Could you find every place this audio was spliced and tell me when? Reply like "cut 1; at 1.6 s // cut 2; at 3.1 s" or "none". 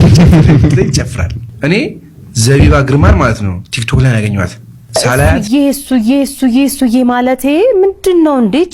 cut 1; at 5.4 s

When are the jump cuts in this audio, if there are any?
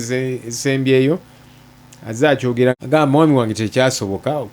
cut 1; at 2.7 s

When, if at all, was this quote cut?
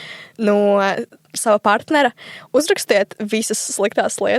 cut 1; at 1.4 s

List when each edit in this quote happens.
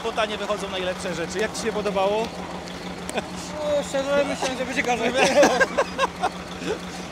none

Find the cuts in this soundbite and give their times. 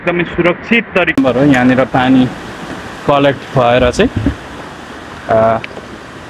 cut 1; at 1.2 s

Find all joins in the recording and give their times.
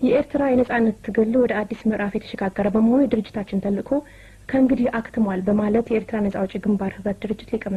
none

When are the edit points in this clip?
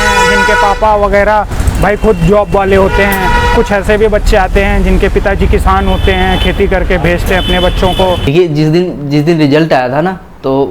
cut 1; at 8.3 s

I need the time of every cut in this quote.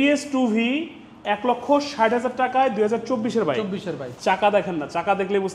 cut 1; at 4.1 s

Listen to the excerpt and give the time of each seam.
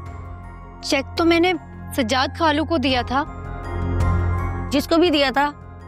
cut 1; at 1.8 s // cut 2; at 4.6 s

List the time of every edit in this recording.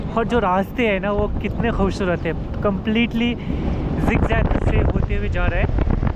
none

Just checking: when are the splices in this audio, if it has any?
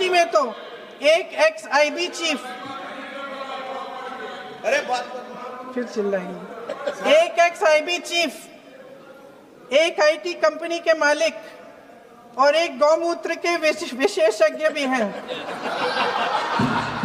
none

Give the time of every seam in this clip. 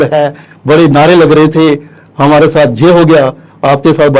none

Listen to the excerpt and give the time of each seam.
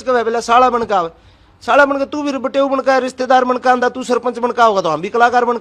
none

